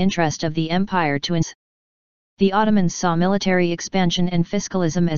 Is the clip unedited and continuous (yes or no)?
yes